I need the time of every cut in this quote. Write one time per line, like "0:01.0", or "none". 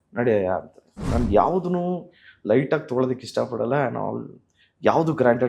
0:00.9